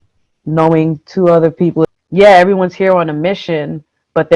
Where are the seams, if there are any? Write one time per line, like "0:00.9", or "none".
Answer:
0:01.9